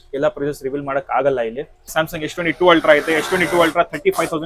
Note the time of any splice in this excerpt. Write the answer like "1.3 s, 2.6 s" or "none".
1.9 s